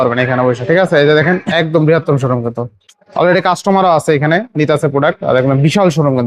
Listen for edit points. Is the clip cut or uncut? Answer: uncut